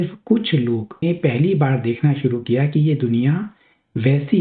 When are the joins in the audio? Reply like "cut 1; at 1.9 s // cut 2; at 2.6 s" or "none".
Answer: cut 1; at 1.0 s